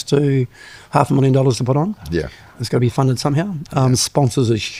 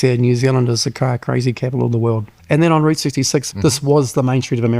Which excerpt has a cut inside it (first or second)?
second